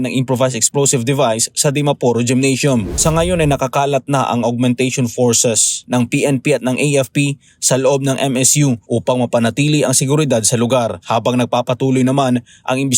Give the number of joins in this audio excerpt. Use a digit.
1